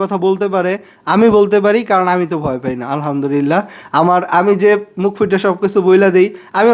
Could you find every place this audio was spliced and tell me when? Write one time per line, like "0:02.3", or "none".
none